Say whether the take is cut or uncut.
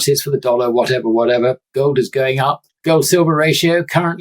cut